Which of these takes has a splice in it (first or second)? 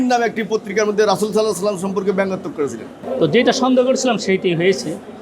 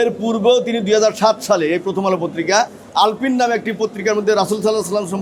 first